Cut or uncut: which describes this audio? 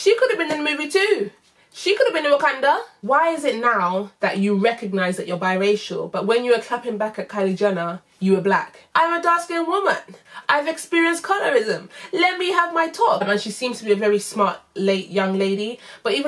cut